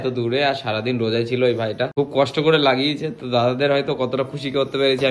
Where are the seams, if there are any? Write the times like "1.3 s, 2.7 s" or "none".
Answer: 1.9 s